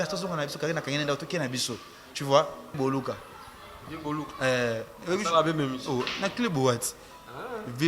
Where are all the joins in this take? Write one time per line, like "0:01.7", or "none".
0:02.8